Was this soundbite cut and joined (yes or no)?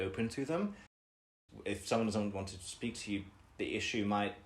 yes